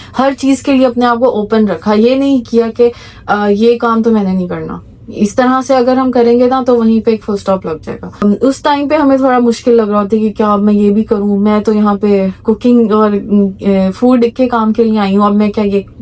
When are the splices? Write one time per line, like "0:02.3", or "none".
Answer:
0:08.2